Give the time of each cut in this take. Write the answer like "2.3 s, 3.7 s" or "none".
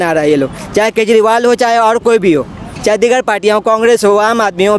none